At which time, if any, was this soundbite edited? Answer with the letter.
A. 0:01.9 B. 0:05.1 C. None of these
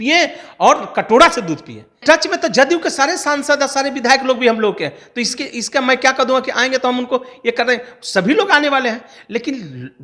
A